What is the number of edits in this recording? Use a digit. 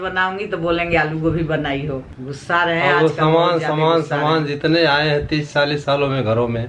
1